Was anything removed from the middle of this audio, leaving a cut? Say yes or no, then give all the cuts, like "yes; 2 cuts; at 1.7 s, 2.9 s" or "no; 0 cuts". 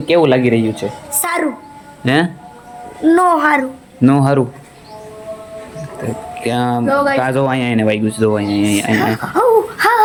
no; 0 cuts